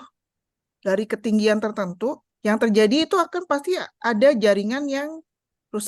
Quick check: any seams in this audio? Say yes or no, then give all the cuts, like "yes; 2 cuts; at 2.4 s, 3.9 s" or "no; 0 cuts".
yes; 1 cut; at 2.3 s